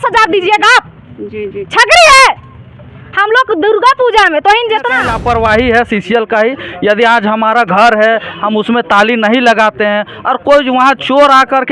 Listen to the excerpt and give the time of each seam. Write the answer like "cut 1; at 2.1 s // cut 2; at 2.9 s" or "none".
cut 1; at 5.1 s